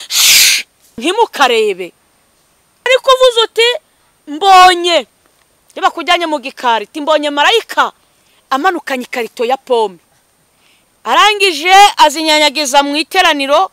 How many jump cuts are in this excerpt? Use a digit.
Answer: 2